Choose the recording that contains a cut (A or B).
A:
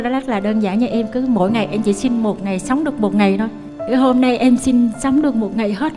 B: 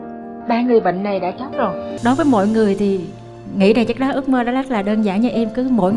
B